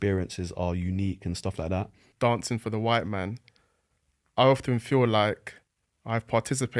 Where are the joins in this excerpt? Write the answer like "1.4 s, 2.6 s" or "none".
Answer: 2.0 s

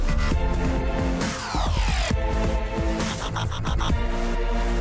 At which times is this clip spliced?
none

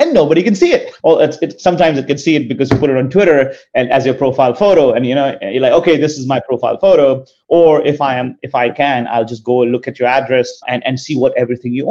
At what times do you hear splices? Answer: 0.9 s, 10.6 s

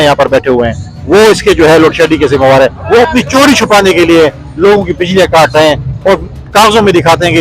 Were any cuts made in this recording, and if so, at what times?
none

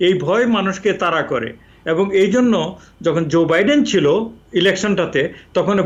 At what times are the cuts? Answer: none

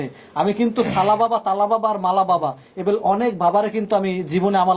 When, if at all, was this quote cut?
none

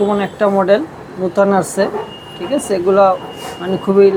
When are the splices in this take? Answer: none

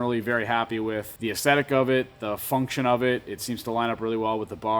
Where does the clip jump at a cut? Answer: 1.1 s

